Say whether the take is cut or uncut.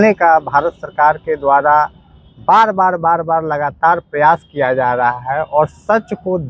uncut